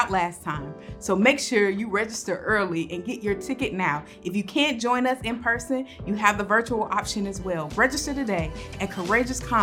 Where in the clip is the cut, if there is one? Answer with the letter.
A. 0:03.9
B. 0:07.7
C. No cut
B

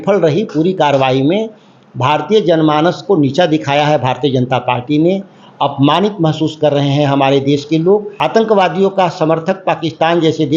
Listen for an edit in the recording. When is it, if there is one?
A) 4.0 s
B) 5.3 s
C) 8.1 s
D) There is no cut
C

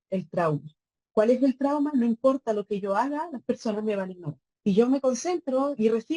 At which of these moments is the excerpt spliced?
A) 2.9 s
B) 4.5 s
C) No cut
B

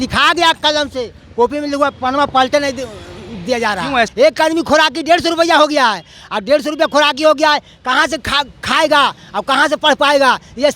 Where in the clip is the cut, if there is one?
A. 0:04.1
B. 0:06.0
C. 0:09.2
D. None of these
A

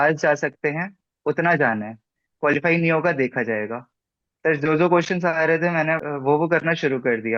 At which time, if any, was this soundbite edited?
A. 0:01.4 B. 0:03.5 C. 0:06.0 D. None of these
C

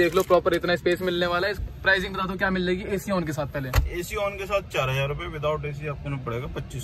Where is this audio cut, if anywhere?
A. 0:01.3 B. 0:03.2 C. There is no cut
C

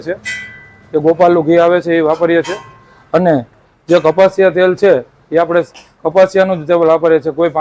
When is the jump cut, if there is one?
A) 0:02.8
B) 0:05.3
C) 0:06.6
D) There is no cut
D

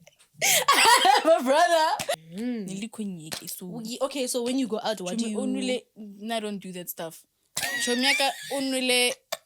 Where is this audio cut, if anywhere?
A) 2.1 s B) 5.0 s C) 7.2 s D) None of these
A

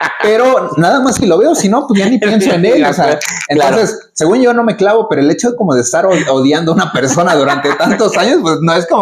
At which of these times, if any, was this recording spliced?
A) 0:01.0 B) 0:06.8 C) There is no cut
C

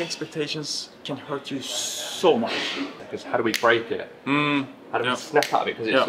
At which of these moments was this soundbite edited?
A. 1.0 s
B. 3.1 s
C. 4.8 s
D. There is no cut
B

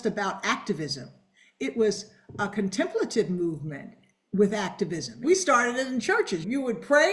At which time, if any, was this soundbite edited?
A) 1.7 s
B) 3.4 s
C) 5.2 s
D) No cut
C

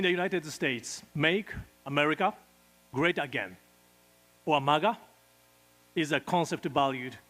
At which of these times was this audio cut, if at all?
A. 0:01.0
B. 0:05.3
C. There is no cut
A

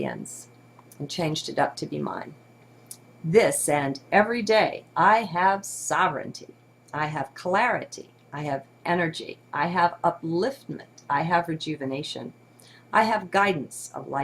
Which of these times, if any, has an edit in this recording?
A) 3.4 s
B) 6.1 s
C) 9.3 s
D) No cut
B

